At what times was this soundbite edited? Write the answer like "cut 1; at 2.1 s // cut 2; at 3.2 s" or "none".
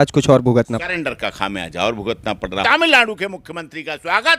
cut 1; at 2.6 s